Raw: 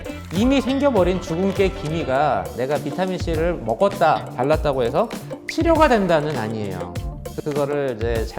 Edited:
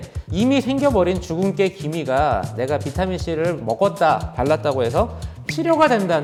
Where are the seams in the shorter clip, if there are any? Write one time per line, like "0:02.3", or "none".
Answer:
none